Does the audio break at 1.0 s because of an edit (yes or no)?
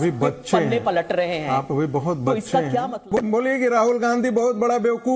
no